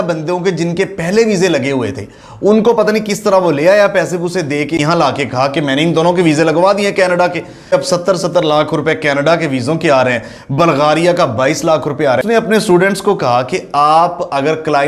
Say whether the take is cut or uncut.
cut